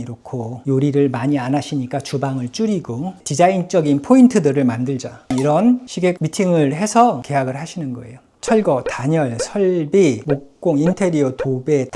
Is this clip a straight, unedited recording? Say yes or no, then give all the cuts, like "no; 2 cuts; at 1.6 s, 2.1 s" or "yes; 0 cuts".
no; 2 cuts; at 3.2 s, 8.4 s